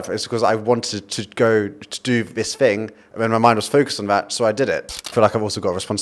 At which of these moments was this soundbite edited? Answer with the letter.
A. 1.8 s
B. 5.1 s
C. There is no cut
B